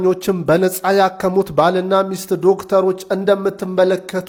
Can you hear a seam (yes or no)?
no